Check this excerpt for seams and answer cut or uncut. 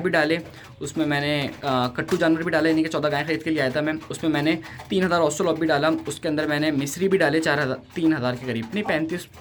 uncut